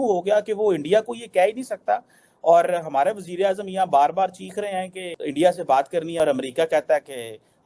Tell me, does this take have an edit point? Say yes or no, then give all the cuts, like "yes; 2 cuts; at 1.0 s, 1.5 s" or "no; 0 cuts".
yes; 1 cut; at 6.1 s